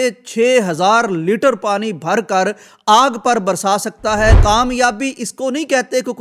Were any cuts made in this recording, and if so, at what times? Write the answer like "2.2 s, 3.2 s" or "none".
4.4 s